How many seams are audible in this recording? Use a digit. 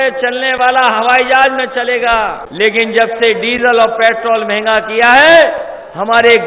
1